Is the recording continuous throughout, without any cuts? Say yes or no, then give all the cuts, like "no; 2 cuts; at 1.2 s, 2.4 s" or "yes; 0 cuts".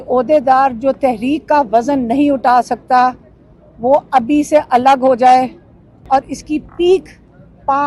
no; 1 cut; at 6.1 s